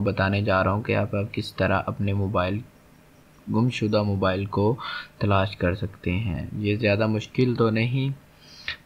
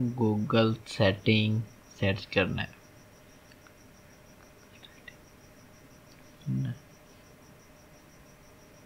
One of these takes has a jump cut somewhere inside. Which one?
second; 1 cut; at 4.6 s

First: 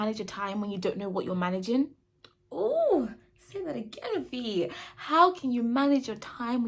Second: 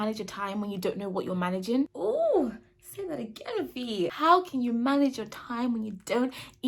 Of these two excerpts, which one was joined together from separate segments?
second; 2 cuts; at 1.9 s, 4.1 s

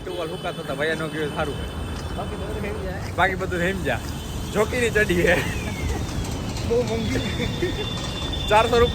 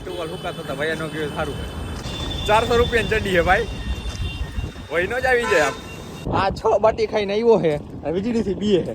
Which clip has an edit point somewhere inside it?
second; 2 cuts; at 2.0 s, 6.2 s

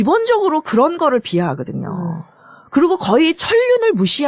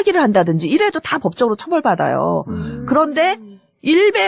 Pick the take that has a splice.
second; 1 cut; at 1.9 s

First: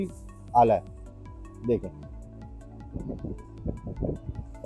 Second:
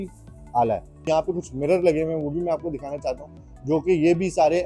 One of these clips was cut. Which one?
second; 1 cut; at 1.1 s

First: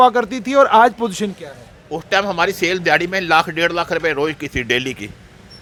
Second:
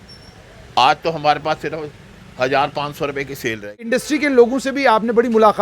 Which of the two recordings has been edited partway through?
second; 1 cut; at 3.7 s

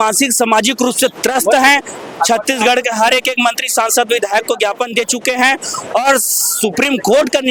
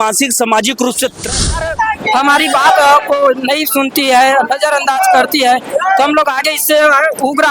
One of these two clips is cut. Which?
second; 1 cut; at 1.4 s

